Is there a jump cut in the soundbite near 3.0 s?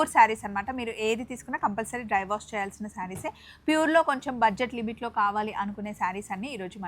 no; 0 cuts

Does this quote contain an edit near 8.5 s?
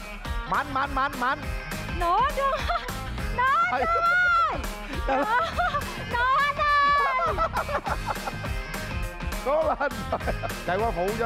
no; 0 cuts

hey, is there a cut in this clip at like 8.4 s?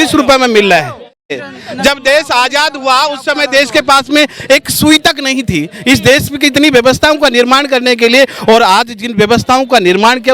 no; 1 cut; at 1.3 s

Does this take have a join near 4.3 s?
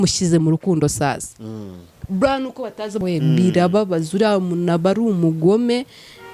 no; 1 cut; at 3.0 s

